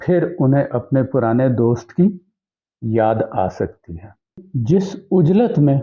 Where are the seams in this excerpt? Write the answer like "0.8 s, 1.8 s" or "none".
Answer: 4.5 s